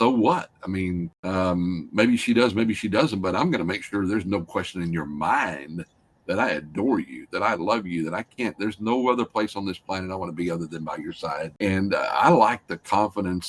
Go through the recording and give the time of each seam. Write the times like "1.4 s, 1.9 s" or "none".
1.1 s, 11.5 s